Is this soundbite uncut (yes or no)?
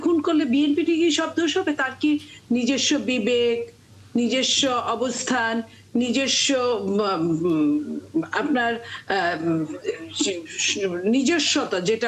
yes